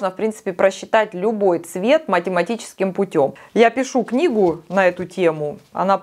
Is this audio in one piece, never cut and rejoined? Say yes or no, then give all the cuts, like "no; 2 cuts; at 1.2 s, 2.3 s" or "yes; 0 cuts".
yes; 0 cuts